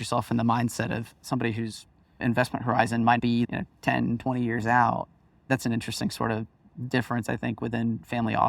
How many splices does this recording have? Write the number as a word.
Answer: one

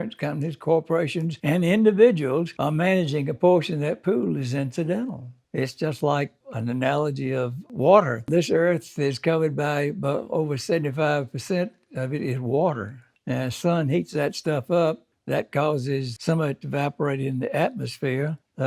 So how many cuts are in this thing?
two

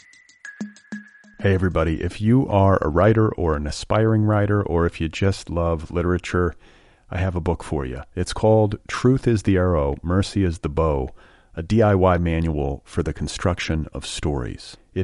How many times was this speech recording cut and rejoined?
one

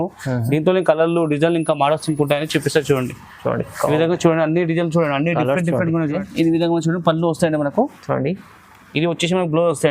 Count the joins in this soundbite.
one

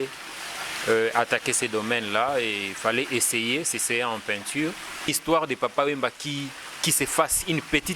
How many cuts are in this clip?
one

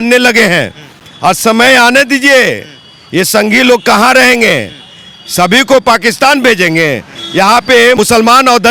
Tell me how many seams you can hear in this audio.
zero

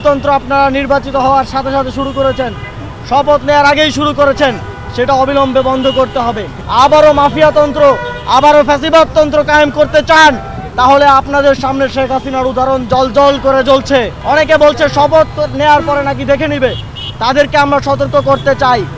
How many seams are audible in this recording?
two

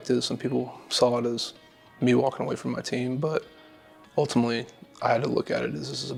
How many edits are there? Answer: zero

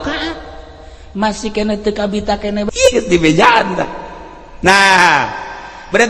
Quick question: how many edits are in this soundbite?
one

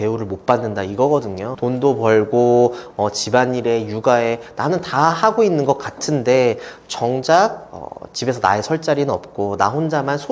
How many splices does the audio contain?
zero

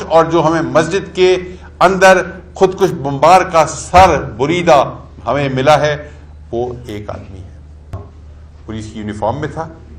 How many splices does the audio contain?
one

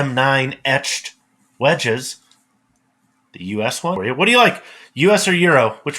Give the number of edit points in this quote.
one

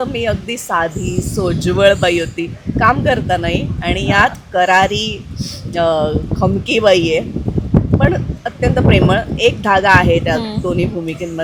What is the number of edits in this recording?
zero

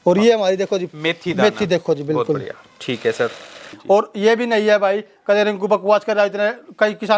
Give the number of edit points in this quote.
one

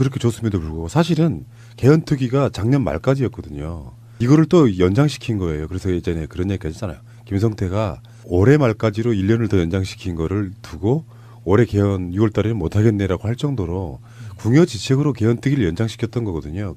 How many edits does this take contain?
zero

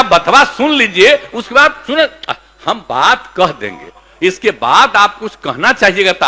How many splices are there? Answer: zero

